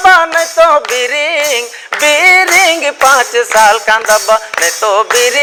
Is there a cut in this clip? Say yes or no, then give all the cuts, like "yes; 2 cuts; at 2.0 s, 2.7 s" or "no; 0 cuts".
no; 0 cuts